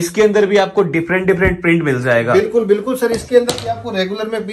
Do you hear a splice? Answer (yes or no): no